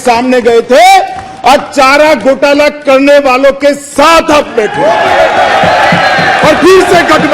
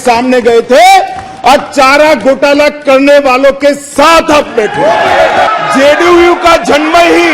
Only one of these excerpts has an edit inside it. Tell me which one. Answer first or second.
second